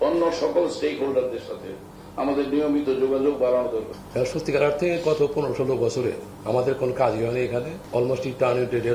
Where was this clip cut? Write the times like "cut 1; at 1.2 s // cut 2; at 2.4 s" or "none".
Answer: cut 1; at 4.0 s // cut 2; at 6.3 s // cut 3; at 7.8 s